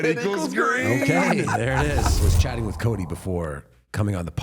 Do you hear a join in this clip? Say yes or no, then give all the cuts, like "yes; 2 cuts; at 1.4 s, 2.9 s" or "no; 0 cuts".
yes; 1 cut; at 2.2 s